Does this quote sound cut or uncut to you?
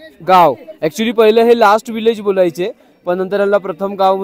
uncut